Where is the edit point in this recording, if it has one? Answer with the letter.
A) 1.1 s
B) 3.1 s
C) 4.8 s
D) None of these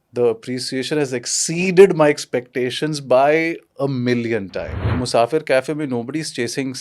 C